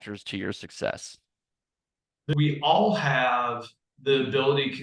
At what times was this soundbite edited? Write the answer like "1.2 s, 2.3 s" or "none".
2.3 s